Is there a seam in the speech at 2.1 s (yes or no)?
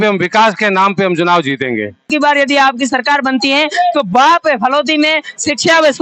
yes